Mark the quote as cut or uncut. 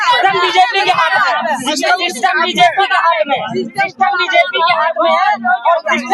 uncut